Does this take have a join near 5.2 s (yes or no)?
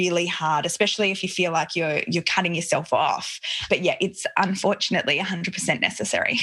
no